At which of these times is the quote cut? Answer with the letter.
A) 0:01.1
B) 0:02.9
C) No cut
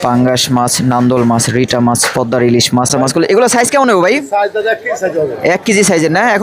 B